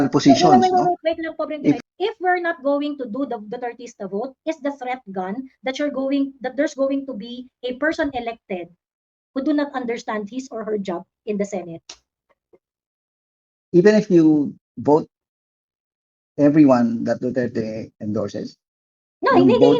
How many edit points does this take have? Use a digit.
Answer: 1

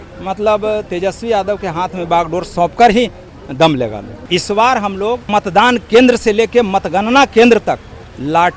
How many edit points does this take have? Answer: 2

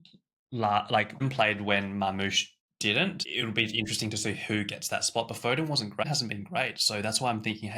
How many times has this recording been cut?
3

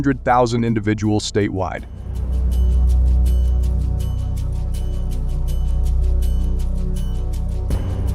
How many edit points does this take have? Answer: 1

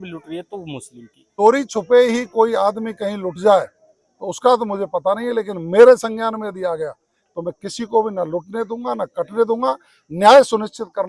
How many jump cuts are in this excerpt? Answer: 1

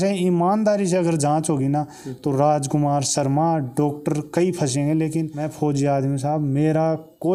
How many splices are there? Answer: 0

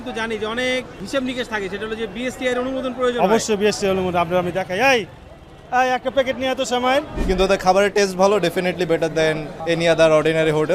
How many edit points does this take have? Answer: 3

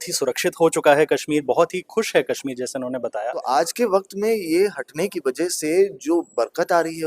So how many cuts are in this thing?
1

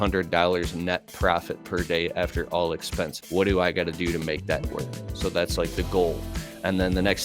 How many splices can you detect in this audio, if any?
1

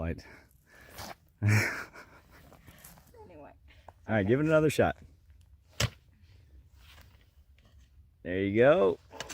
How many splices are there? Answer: 1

